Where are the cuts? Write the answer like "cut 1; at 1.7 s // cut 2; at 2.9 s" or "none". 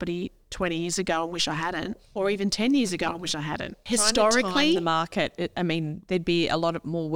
cut 1; at 3.7 s